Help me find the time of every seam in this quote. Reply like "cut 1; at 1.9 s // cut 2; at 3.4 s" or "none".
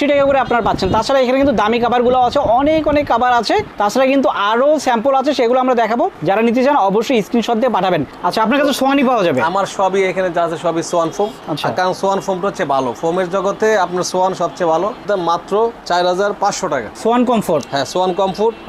cut 1; at 8.1 s // cut 2; at 15.0 s // cut 3; at 16.9 s